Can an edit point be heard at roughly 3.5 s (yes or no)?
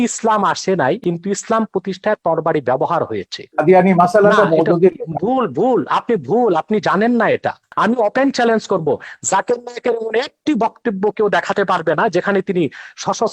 yes